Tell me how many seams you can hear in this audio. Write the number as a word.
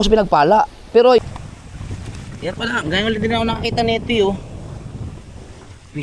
one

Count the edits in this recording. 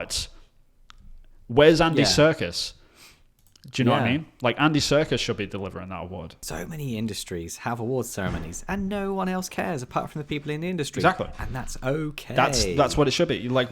one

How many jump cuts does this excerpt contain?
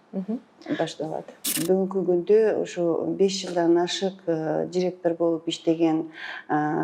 one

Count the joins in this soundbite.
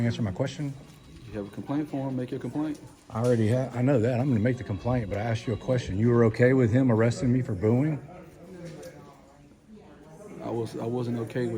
zero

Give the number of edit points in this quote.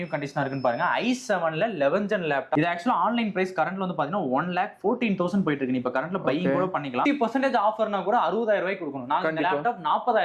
two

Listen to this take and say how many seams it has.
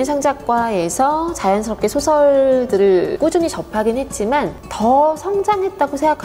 two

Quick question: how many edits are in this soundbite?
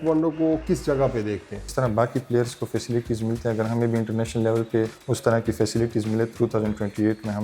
three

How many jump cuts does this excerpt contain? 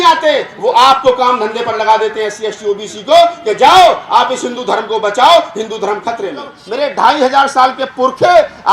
one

